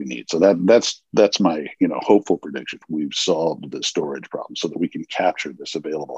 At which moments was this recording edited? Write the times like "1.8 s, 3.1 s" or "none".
2.8 s